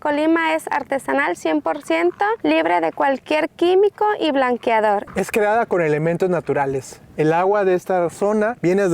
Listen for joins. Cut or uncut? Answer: uncut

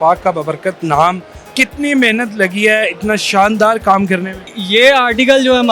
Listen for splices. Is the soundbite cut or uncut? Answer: cut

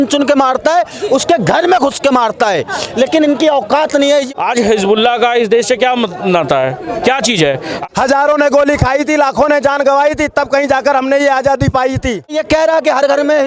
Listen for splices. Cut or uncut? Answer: cut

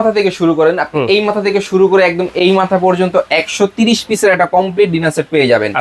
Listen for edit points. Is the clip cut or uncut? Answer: uncut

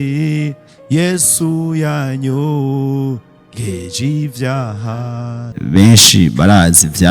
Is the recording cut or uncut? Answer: cut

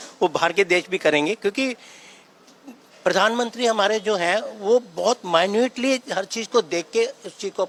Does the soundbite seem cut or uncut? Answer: uncut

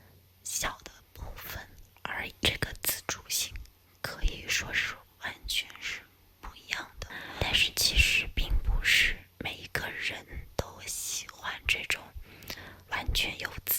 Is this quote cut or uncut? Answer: cut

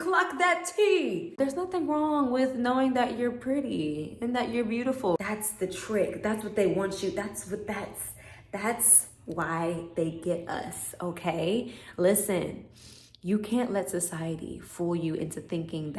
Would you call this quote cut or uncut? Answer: cut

